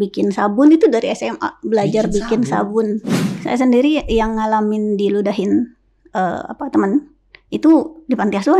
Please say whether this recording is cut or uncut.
cut